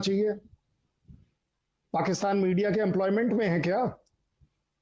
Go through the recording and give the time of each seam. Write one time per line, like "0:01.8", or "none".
none